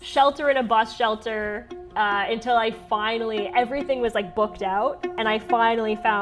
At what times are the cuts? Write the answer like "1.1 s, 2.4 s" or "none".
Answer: 5.2 s